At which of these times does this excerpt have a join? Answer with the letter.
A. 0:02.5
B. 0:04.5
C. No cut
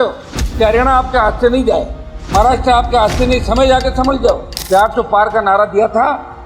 B